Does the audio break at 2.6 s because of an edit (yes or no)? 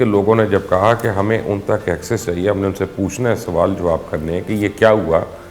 no